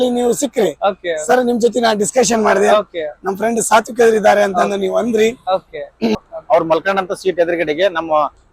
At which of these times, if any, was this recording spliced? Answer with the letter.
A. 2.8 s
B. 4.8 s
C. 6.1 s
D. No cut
C